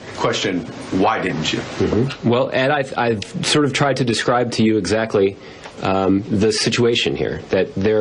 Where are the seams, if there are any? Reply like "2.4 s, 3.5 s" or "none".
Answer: 3.4 s